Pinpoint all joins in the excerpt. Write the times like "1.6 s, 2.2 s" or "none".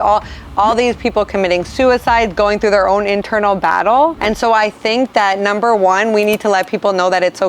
4.2 s